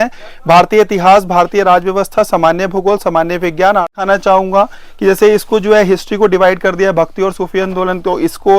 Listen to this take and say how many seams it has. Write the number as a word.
one